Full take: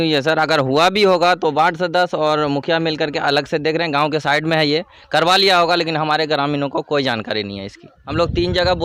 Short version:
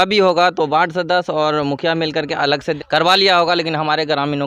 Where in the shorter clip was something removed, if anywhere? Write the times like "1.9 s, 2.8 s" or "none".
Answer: 2.8 s